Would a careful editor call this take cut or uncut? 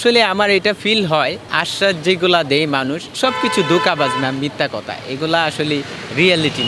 cut